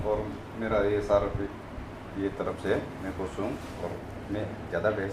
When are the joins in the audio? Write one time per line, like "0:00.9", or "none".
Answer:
none